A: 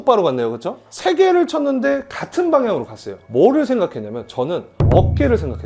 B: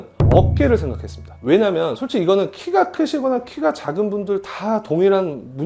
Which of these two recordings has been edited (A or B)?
A